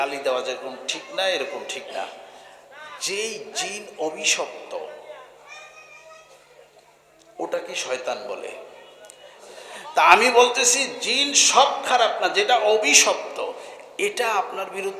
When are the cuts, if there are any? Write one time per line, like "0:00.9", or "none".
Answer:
0:09.4